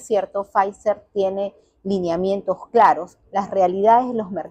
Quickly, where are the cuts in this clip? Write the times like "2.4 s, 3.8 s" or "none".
none